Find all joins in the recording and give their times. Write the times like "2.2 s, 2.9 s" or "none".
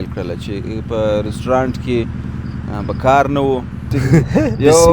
3.8 s